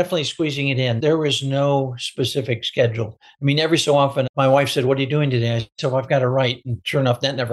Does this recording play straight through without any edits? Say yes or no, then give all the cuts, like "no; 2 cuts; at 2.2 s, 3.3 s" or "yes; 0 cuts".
no; 2 cuts; at 0.9 s, 4.3 s